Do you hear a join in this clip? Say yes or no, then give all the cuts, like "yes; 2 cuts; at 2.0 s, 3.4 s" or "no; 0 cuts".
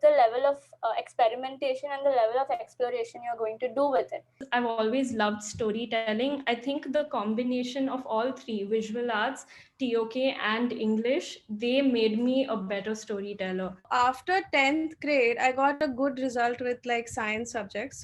yes; 3 cuts; at 4.4 s, 13.8 s, 15.8 s